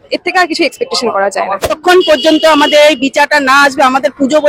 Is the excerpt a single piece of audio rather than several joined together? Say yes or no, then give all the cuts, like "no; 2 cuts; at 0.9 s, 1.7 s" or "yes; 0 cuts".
no; 1 cut; at 1.7 s